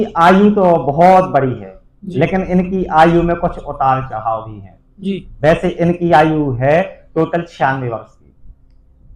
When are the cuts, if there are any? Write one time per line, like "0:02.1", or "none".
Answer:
none